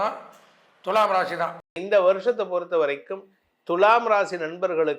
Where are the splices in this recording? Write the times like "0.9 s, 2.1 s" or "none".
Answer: 1.7 s